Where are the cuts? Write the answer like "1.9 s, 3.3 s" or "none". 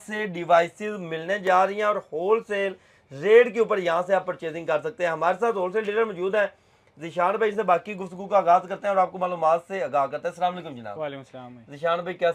none